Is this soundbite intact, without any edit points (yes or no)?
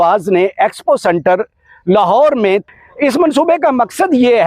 no